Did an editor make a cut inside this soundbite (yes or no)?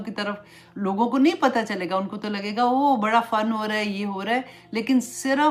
no